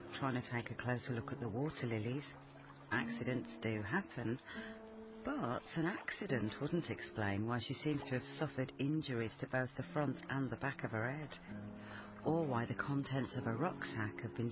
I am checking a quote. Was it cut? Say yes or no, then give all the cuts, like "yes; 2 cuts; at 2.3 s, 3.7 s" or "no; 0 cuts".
yes; 1 cut; at 13.0 s